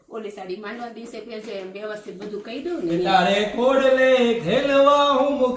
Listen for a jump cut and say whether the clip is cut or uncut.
cut